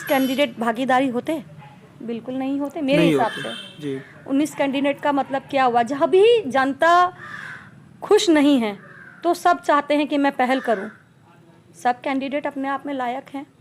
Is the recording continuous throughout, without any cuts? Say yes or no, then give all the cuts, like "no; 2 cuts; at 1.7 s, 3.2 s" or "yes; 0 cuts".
yes; 0 cuts